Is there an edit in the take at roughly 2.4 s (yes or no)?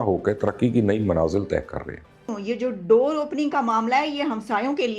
yes